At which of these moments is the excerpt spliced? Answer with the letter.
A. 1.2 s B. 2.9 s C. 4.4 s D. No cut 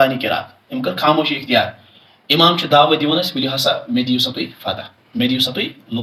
D